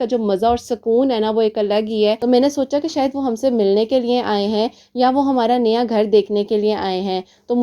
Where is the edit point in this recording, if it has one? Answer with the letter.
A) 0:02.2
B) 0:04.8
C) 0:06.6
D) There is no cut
A